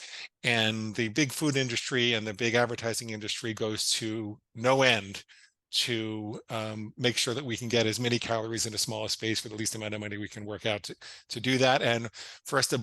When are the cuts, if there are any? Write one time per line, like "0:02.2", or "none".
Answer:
none